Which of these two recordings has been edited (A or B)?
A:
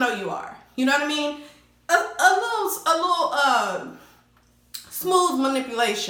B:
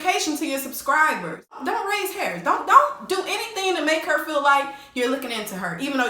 B